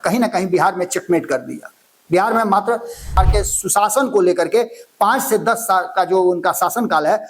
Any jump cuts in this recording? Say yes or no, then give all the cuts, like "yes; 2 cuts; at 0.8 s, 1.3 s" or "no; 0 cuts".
yes; 1 cut; at 3.2 s